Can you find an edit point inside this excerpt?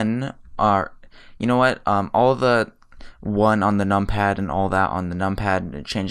yes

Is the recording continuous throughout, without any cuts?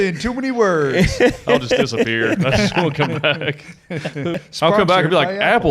no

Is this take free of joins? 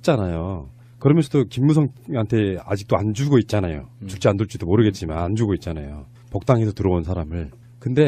no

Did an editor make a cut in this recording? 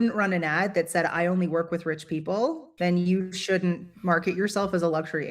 yes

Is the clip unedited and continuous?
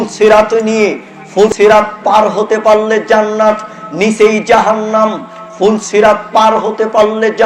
no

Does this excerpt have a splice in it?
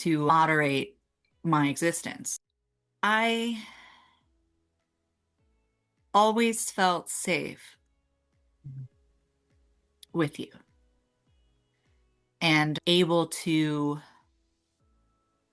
yes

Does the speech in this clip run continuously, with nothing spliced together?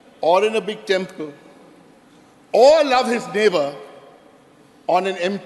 yes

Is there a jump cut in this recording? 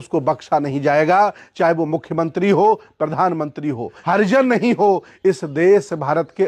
yes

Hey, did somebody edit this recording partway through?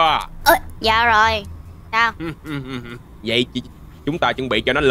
no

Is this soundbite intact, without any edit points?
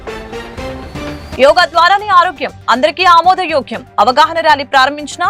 yes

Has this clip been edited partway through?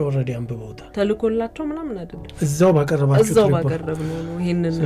yes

